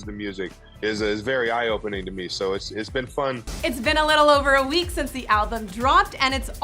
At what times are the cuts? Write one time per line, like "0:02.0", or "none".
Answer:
0:03.5